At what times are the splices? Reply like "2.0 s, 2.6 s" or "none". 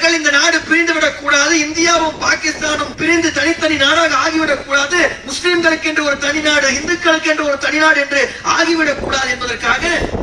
2.9 s